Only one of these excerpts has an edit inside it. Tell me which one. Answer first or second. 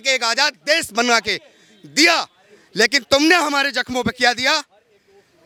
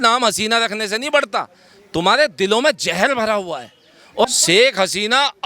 second